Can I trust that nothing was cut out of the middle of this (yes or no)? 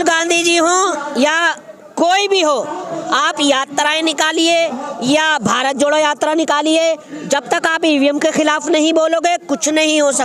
yes